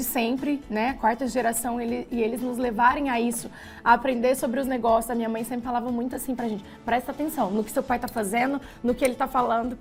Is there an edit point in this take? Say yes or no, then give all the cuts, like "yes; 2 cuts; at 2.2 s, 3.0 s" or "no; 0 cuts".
no; 0 cuts